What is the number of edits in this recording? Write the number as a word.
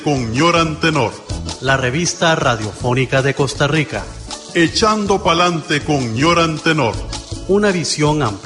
zero